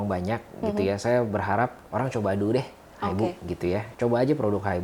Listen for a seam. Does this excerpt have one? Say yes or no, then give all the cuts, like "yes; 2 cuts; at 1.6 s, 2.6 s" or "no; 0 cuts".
yes; 2 cuts; at 1.8 s, 3.9 s